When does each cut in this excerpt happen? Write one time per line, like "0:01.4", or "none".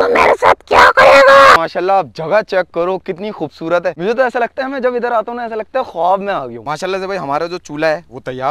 0:01.6
0:06.6